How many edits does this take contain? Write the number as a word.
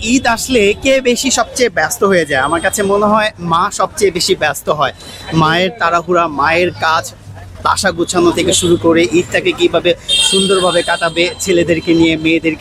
zero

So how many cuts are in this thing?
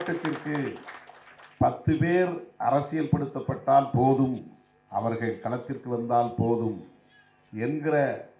zero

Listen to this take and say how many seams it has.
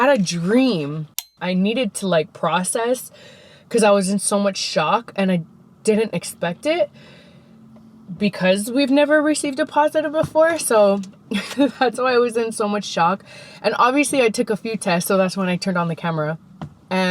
one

